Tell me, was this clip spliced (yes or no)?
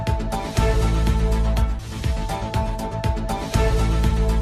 no